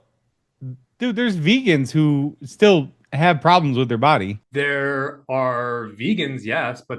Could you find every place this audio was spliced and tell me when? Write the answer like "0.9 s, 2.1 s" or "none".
4.4 s